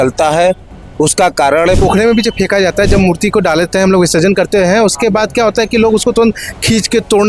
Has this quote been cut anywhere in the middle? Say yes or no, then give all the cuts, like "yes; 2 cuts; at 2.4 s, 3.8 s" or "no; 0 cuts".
yes; 1 cut; at 1.8 s